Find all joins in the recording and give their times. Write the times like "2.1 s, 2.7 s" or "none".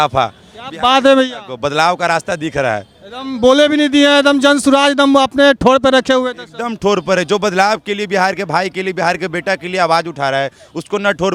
none